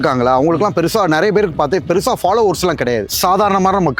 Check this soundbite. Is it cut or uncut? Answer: cut